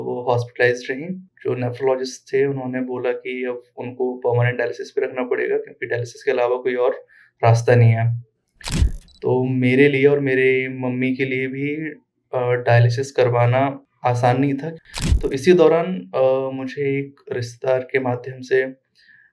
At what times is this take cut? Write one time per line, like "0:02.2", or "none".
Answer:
0:01.3
0:14.8